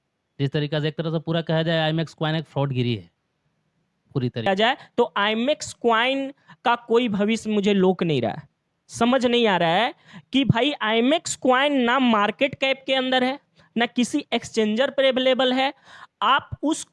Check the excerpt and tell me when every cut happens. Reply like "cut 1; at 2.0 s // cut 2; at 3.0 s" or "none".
cut 1; at 4.5 s